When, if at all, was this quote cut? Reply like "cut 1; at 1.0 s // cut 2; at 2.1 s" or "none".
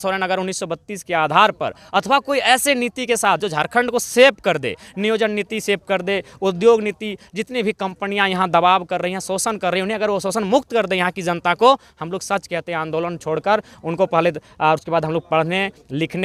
none